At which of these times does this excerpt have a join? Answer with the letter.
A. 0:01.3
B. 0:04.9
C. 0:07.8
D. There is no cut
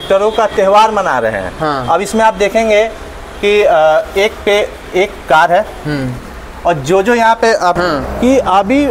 C